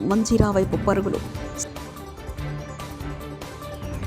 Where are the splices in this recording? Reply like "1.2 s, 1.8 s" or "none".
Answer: none